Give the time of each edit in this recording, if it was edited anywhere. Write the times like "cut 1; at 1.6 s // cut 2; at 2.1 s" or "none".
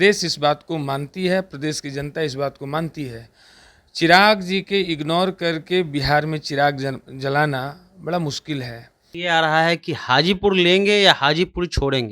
cut 1; at 9.1 s